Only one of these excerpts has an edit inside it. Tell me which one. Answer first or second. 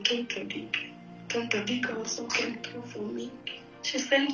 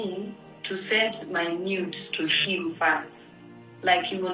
first